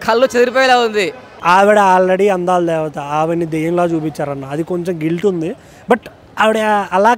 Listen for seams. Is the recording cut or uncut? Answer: cut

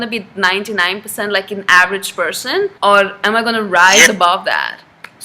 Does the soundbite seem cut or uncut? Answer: cut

